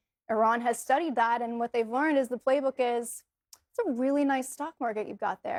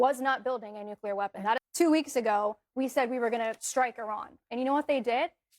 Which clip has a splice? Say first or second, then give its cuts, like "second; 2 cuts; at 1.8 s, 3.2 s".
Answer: second; 1 cut; at 1.6 s